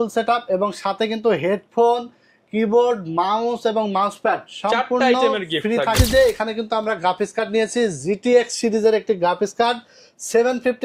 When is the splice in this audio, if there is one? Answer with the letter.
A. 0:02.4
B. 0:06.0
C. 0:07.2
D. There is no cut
B